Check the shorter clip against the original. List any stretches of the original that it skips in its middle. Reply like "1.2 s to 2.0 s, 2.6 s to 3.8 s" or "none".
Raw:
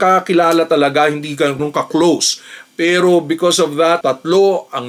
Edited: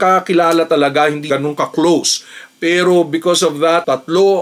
1.4 s to 1.5 s